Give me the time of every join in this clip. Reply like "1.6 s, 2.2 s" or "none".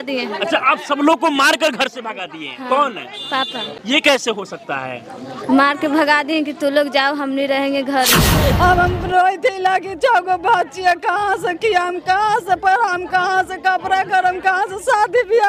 3.8 s, 8.4 s